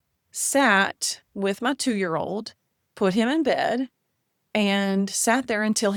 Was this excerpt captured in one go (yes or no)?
yes